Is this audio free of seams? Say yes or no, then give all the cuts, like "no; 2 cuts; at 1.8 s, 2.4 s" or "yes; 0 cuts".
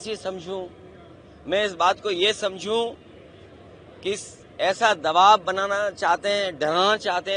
yes; 0 cuts